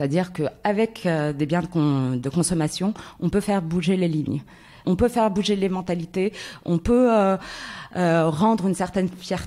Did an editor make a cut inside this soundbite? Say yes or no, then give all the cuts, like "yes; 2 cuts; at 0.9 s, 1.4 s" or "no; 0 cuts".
yes; 1 cut; at 4.8 s